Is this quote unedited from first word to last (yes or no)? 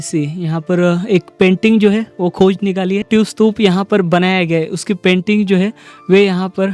no